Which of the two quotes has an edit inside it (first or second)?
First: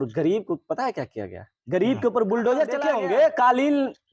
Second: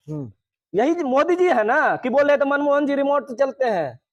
first